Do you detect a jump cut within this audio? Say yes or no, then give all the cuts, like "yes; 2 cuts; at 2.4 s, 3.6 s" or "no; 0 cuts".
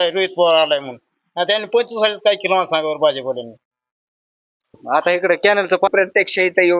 yes; 1 cut; at 5.9 s